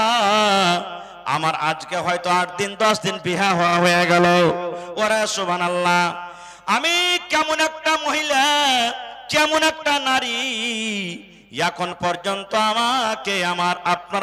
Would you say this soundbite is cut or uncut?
uncut